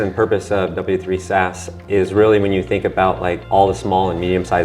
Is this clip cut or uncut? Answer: cut